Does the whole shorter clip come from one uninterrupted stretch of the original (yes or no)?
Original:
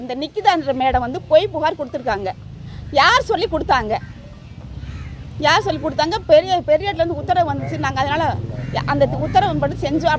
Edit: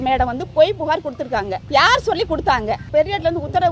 no